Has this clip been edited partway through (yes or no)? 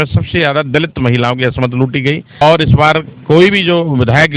yes